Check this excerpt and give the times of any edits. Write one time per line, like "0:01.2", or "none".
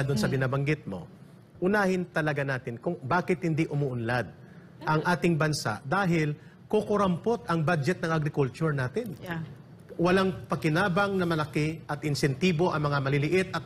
none